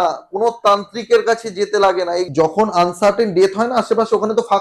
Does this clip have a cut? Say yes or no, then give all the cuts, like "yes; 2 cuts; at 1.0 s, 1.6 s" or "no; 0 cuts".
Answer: yes; 1 cut; at 2.3 s